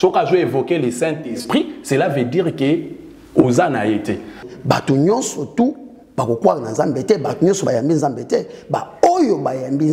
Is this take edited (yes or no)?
yes